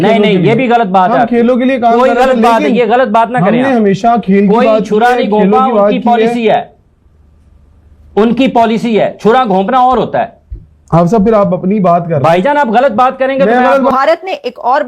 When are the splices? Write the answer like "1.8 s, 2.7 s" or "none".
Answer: 13.9 s